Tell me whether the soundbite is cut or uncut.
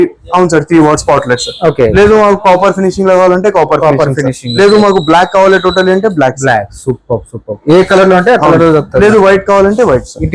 uncut